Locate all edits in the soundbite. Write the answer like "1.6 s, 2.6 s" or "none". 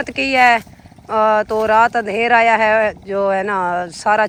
none